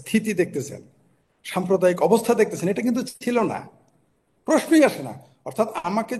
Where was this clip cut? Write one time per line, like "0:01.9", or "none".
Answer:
none